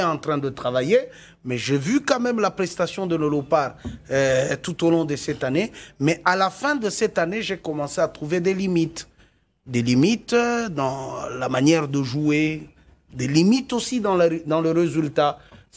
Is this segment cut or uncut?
uncut